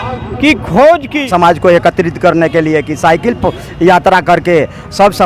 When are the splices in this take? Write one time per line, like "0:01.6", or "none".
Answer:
0:01.3